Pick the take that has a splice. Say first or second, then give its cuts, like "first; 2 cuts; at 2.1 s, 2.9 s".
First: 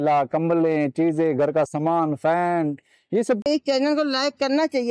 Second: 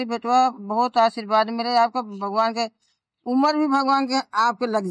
first; 1 cut; at 3.5 s